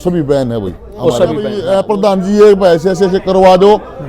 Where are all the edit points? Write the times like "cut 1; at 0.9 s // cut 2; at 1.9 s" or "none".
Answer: cut 1; at 1.6 s